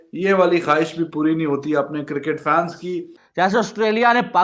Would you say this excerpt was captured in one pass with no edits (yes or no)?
no